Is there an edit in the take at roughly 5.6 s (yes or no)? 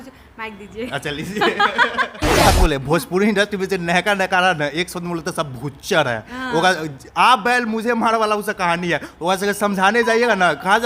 no